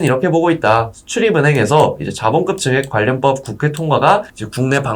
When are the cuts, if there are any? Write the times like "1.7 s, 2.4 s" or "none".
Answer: none

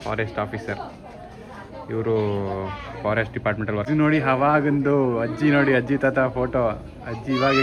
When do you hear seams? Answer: 3.9 s

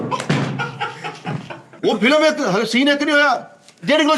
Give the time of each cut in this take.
1.7 s

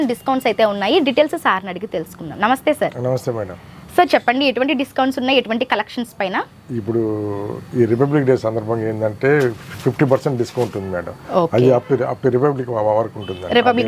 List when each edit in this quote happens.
none

